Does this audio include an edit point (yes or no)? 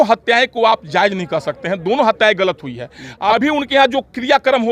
yes